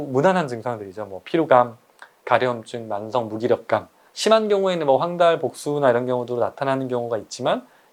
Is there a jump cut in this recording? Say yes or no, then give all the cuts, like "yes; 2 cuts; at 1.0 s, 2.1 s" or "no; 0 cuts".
no; 0 cuts